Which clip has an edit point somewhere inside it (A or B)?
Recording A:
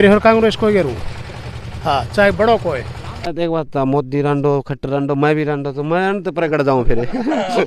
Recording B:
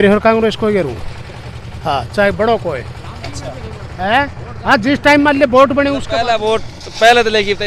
A